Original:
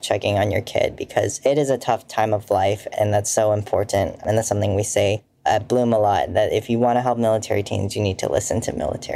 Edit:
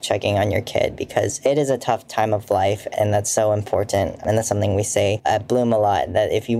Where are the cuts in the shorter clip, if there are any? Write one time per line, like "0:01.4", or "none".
0:05.2